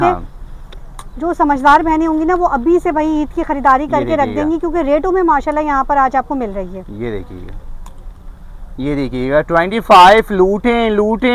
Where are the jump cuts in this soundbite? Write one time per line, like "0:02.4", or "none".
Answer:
none